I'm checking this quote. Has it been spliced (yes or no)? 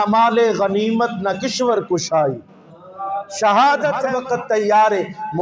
yes